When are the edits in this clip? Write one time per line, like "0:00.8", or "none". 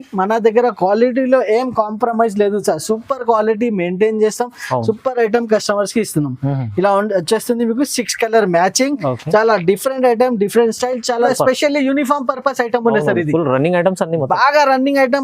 0:11.3